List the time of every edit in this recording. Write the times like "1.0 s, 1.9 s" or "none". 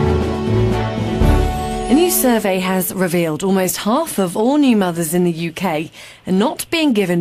1.9 s